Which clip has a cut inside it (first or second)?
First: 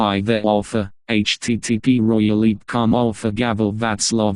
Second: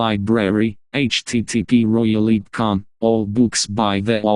second